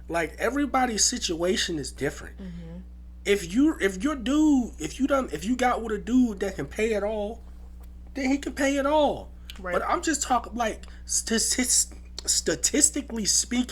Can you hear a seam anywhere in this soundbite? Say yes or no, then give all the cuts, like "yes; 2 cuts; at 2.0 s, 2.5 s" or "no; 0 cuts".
no; 0 cuts